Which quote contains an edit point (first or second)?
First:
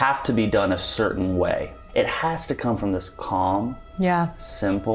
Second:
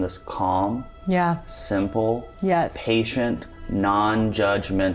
first